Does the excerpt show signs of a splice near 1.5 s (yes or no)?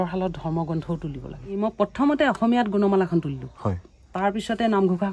yes